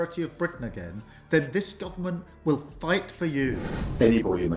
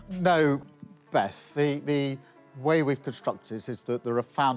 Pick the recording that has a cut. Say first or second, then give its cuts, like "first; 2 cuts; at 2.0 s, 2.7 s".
first; 1 cut; at 3.6 s